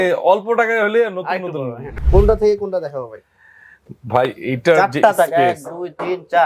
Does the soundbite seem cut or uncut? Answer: cut